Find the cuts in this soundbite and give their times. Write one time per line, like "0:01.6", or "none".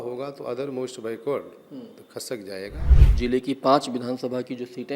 0:03.0